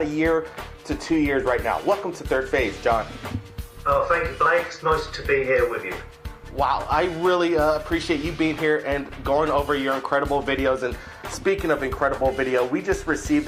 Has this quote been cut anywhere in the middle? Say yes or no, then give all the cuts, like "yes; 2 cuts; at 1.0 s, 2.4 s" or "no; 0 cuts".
yes; 1 cut; at 4.1 s